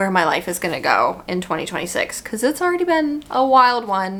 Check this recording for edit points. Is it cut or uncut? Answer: uncut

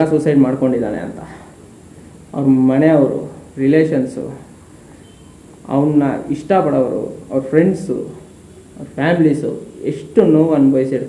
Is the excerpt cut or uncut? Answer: uncut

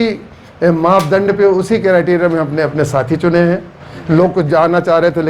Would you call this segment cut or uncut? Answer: uncut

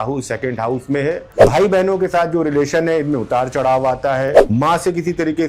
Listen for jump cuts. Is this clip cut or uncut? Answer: cut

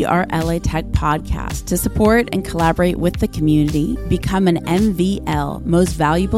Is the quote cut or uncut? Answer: uncut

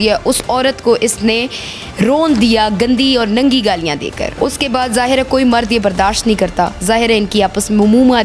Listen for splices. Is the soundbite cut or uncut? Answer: uncut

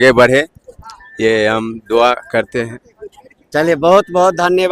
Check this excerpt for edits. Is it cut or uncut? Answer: uncut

